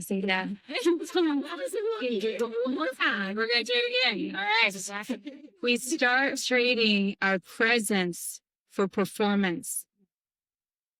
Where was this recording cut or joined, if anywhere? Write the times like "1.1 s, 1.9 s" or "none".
none